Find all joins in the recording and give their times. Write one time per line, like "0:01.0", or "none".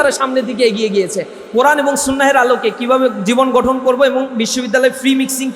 0:01.3